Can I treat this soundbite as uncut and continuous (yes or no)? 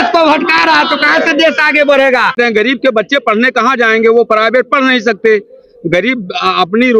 no